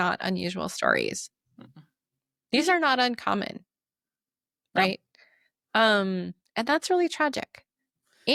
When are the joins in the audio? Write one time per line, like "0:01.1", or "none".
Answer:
none